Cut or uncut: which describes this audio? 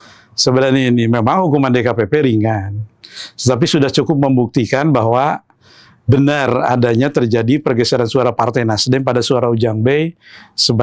uncut